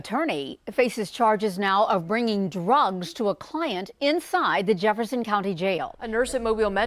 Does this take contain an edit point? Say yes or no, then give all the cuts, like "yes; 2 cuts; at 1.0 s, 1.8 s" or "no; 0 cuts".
yes; 1 cut; at 6.0 s